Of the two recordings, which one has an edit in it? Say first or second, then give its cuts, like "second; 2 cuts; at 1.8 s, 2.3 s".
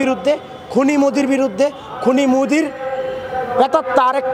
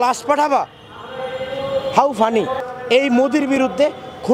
second; 1 cut; at 2.6 s